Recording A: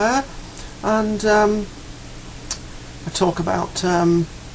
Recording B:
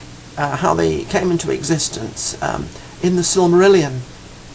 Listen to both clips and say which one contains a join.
B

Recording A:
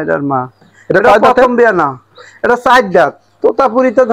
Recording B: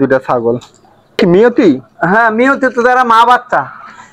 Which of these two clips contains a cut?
B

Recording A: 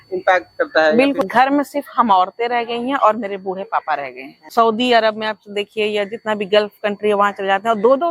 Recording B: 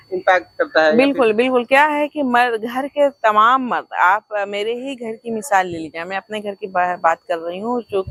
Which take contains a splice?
A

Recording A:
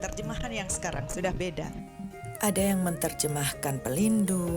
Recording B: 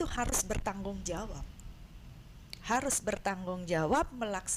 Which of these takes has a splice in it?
A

